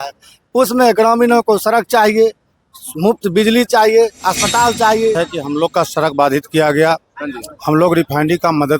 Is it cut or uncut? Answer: cut